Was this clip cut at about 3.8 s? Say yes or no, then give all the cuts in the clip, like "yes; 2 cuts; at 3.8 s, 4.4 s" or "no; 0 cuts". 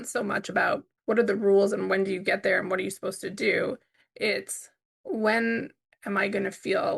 no; 1 cut; at 0.9 s